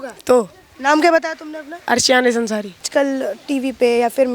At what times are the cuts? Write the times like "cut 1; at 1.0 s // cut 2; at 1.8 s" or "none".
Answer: cut 1; at 2.9 s

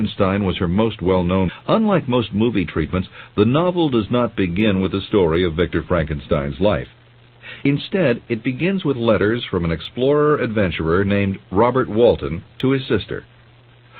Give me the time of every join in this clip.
none

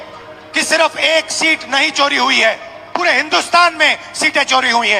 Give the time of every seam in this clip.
cut 1; at 2.8 s

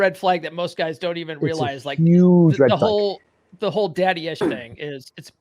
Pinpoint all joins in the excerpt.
cut 1; at 4.4 s

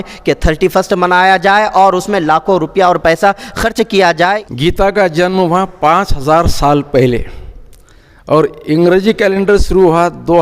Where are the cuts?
cut 1; at 4.4 s

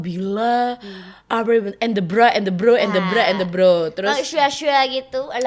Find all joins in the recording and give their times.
none

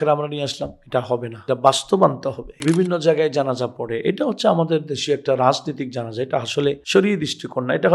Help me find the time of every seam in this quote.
cut 1; at 1.3 s // cut 2; at 2.6 s

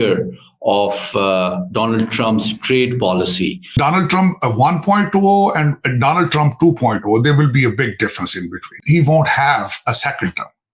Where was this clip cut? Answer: cut 1; at 3.7 s // cut 2; at 8.8 s

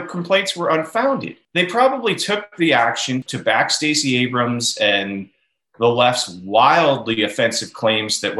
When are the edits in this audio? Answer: cut 1; at 1.4 s // cut 2; at 3.3 s

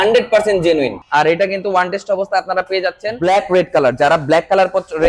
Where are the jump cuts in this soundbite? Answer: cut 1; at 1.0 s // cut 2; at 3.1 s

